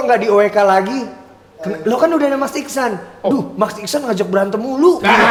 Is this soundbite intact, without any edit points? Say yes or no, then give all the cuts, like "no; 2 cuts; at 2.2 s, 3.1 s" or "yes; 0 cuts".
yes; 0 cuts